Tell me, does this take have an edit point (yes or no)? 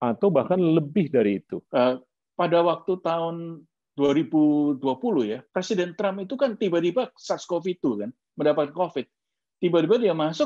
yes